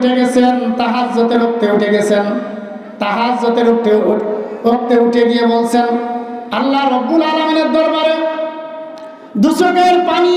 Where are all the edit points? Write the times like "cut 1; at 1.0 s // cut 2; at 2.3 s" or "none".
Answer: none